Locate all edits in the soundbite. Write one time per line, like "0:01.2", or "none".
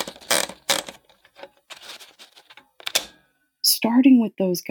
0:03.3